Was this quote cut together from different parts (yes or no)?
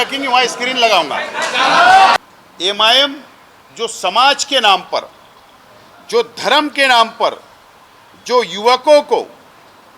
yes